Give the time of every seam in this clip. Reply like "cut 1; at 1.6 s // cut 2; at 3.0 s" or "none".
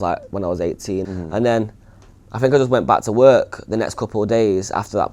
none